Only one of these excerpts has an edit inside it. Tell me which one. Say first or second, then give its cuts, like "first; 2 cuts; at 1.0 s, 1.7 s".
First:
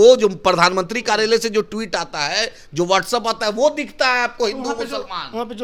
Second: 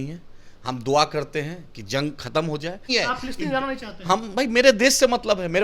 second; 1 cut; at 2.9 s